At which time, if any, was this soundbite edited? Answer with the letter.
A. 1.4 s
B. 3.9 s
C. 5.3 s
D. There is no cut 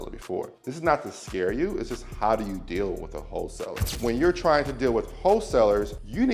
B